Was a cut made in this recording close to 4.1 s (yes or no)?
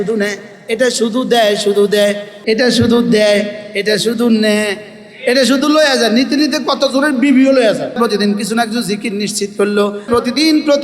no